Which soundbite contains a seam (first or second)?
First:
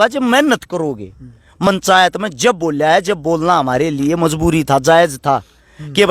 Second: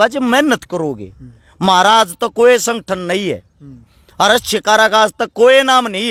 first